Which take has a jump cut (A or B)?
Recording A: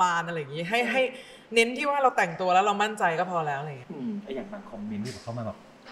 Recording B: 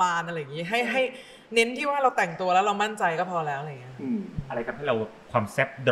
A